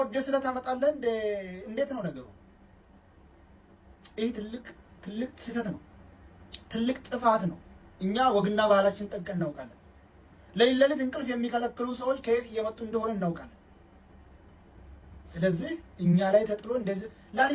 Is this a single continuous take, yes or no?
yes